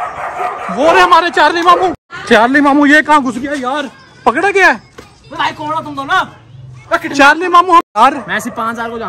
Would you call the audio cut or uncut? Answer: cut